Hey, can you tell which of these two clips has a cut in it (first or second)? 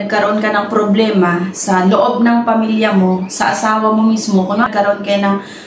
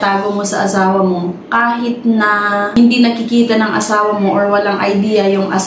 first